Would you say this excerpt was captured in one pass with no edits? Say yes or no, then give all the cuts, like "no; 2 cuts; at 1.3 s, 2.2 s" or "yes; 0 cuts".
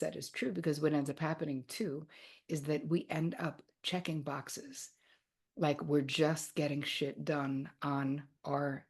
yes; 0 cuts